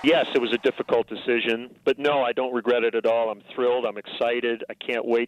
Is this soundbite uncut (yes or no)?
no